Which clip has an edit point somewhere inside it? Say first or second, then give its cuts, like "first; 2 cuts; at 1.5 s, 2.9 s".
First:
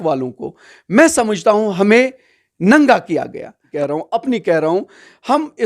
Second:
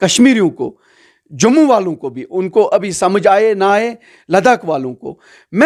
first; 1 cut; at 3.6 s